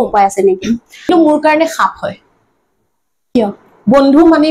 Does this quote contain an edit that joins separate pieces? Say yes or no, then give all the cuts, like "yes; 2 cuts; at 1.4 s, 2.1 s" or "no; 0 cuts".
yes; 1 cut; at 1.1 s